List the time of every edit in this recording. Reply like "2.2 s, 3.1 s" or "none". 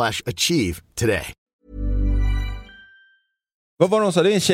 1.5 s, 3.7 s